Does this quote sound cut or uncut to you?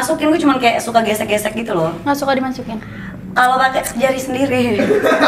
uncut